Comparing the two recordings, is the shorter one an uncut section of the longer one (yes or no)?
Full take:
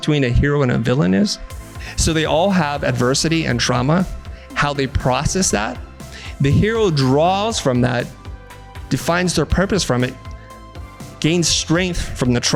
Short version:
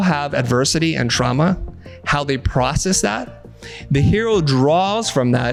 yes